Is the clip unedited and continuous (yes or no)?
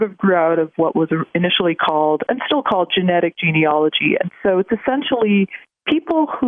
yes